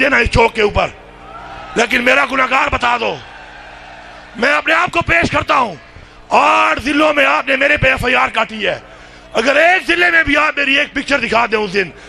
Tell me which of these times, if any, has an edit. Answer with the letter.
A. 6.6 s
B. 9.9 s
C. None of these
C